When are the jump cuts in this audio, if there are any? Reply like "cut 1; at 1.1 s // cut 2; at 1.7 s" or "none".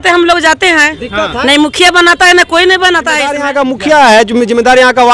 cut 1; at 3.4 s